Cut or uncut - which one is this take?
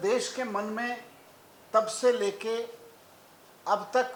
uncut